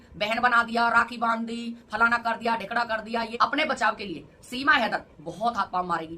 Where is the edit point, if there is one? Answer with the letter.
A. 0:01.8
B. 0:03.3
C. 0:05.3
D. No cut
B